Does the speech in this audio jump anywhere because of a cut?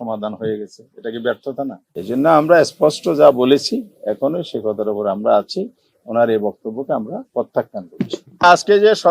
yes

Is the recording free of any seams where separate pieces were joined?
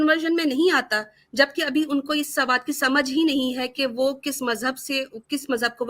yes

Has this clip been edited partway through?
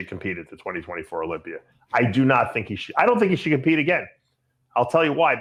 no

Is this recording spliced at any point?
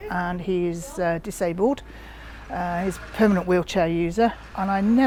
no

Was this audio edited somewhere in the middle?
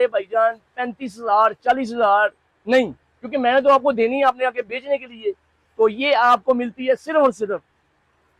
no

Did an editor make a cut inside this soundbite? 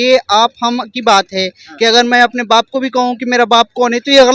no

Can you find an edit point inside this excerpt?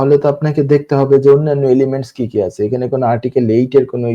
no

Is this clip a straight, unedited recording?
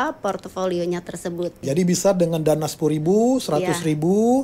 no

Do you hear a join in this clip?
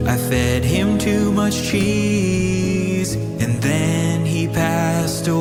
no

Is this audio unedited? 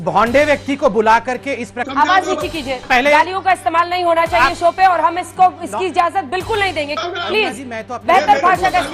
no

